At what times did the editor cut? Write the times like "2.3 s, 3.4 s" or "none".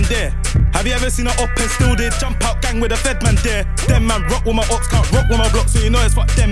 none